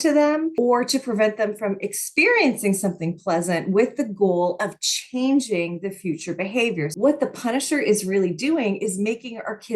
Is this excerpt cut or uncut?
cut